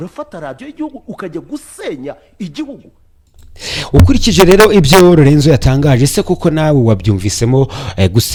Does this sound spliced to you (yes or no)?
no